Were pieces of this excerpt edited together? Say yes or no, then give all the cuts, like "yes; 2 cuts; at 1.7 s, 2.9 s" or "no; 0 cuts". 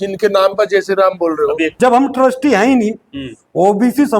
yes; 1 cut; at 1.7 s